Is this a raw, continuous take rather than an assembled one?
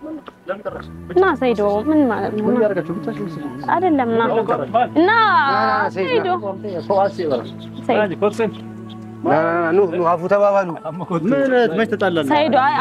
yes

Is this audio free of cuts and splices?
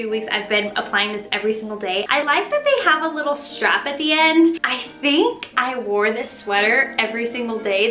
no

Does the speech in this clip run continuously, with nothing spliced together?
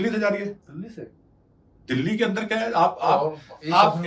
yes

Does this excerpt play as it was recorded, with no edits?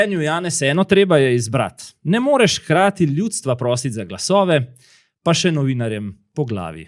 yes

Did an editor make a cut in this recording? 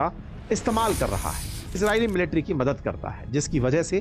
yes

